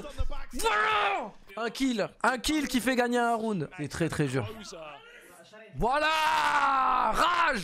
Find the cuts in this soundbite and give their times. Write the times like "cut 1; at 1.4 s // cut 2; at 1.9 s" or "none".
cut 1; at 1.4 s // cut 2; at 3.7 s